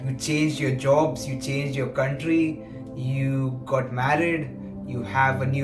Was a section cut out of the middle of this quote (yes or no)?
no